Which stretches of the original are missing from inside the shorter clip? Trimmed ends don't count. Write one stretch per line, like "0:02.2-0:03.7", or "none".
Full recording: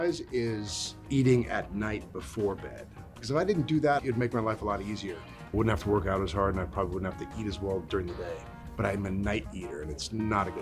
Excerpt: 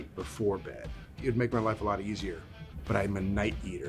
0:03.2-0:04.0
0:05.4-0:08.5